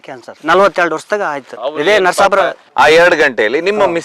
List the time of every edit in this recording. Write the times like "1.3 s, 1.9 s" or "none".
2.7 s